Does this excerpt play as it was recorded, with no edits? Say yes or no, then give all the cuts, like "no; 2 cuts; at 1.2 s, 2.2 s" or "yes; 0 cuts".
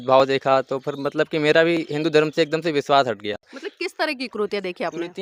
yes; 0 cuts